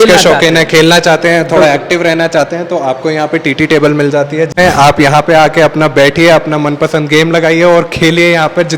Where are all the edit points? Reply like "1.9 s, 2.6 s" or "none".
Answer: 4.6 s